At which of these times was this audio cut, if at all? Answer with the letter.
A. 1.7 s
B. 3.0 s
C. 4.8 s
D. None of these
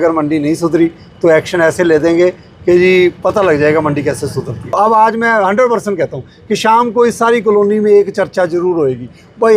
C